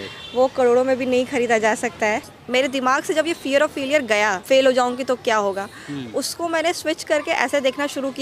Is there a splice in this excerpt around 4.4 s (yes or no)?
yes